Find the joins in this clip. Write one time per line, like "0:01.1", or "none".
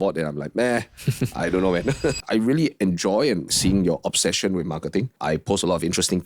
0:02.2
0:03.5
0:05.1